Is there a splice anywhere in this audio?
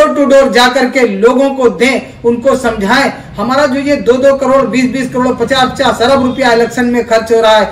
no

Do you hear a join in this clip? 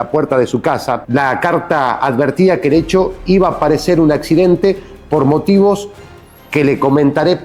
yes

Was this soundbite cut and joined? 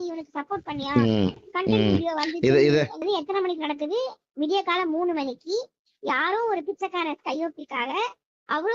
yes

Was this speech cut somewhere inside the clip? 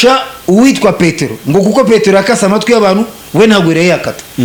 no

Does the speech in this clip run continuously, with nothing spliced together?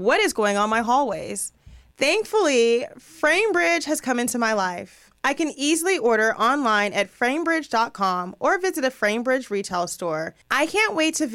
no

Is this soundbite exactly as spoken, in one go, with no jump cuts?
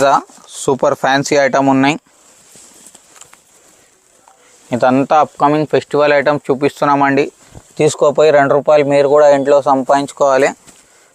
yes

